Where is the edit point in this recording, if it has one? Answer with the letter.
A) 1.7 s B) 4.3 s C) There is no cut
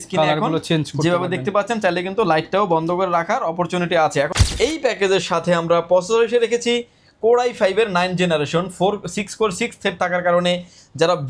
B